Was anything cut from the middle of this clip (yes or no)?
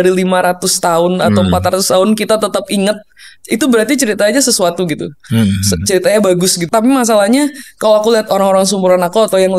yes